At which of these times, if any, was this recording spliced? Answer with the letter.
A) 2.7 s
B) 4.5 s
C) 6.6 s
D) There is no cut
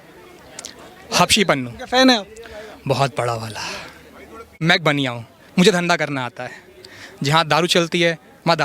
B